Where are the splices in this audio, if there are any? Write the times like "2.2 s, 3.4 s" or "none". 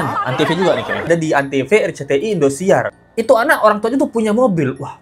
1.1 s, 3.0 s